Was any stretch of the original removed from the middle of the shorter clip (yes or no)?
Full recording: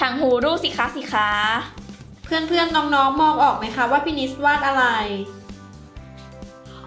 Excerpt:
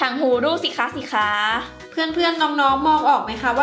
yes